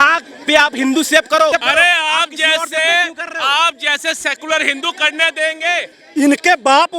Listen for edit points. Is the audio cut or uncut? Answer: cut